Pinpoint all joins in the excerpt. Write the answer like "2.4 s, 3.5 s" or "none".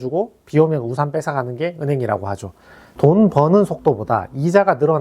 2.8 s